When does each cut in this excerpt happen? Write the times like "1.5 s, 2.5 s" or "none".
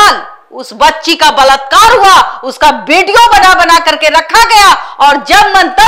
none